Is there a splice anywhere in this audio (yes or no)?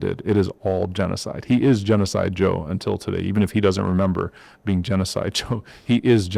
no